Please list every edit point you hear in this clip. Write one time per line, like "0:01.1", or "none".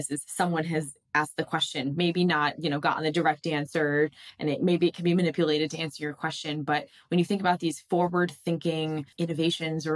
0:09.1